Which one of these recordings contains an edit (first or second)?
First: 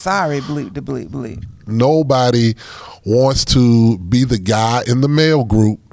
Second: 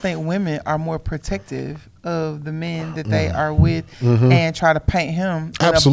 first